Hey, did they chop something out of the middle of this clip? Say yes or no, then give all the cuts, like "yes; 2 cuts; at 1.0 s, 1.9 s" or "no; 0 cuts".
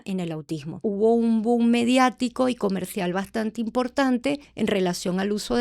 yes; 2 cuts; at 0.8 s, 4.5 s